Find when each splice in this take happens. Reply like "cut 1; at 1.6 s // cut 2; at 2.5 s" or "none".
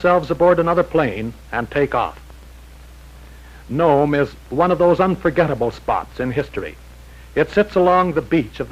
cut 1; at 1.5 s